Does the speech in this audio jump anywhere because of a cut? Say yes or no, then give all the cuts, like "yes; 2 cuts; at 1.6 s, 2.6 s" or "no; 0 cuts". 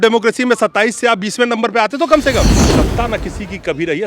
yes; 1 cut; at 2.6 s